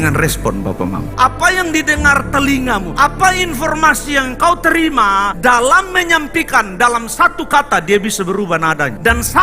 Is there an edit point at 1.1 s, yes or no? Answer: yes